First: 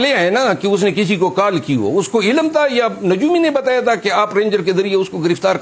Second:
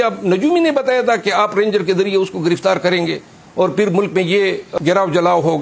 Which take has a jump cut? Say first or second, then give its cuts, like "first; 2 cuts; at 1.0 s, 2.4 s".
second; 1 cut; at 4.7 s